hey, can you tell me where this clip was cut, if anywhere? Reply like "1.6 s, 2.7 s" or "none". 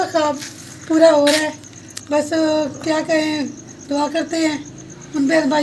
none